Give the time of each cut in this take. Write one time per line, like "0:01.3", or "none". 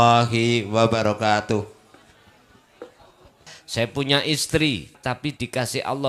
0:03.6
0:05.0